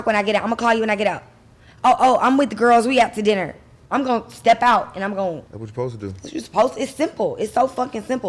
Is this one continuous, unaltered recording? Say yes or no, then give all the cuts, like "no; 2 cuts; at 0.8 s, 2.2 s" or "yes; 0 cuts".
no; 1 cut; at 5.5 s